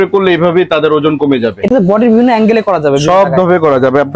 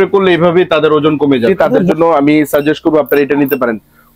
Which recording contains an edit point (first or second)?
second